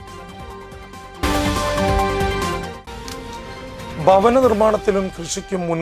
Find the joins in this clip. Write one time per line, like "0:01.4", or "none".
0:01.2